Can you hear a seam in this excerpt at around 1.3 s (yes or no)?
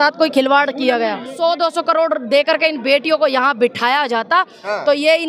yes